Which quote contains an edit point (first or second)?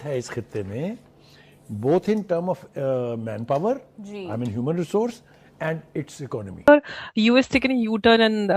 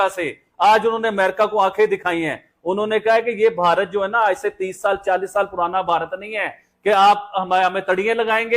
first